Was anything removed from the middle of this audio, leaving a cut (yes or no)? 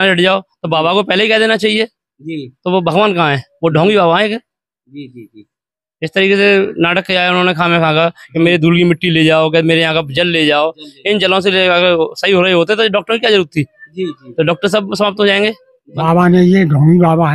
yes